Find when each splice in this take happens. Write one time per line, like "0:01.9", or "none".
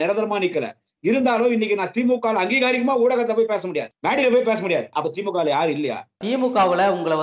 0:03.9
0:04.9
0:06.2